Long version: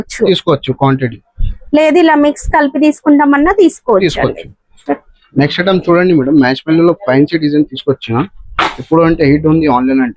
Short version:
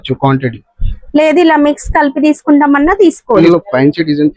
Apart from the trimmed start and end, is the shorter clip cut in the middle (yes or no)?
yes